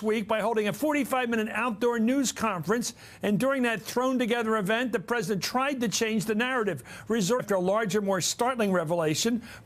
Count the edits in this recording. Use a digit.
0